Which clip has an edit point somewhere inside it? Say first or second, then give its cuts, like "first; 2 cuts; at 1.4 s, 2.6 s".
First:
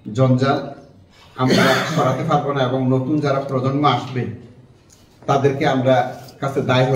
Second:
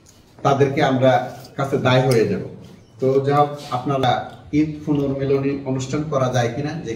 second; 1 cut; at 4.0 s